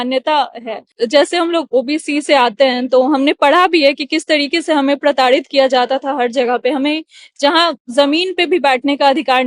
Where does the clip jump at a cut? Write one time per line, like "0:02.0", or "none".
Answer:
0:00.9